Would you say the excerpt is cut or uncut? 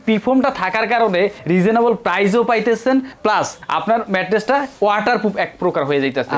cut